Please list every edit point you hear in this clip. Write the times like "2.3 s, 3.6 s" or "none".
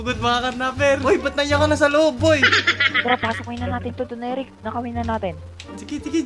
1.0 s